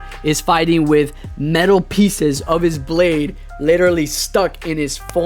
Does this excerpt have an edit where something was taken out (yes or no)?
no